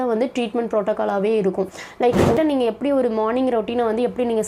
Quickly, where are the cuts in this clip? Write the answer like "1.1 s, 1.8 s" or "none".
2.4 s